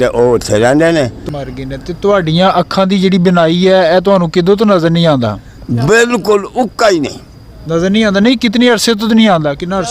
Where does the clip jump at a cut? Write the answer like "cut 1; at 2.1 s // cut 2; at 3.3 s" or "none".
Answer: cut 1; at 1.2 s